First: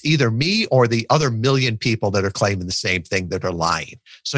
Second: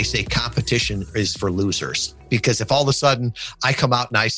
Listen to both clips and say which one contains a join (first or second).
second